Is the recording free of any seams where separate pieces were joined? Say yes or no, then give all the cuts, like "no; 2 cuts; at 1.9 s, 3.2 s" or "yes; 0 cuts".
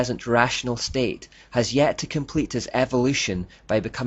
yes; 0 cuts